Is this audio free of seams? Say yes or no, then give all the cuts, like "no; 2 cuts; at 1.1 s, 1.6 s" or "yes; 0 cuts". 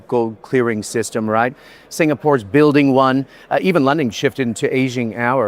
yes; 0 cuts